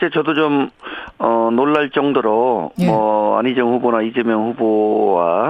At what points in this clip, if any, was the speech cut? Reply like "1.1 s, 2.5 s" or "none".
3.8 s